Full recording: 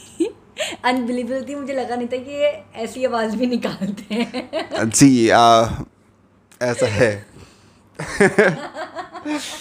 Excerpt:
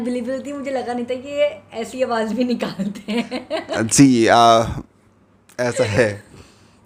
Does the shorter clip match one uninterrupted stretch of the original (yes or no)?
yes